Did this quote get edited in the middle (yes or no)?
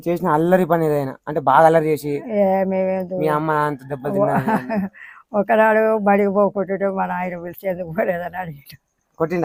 no